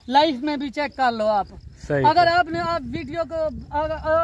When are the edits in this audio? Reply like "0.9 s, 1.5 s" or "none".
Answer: none